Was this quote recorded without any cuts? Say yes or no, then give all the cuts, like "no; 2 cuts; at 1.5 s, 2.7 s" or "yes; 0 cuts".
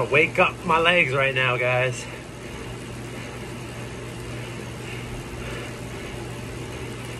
yes; 0 cuts